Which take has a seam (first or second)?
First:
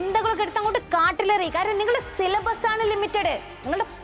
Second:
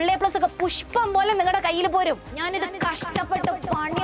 second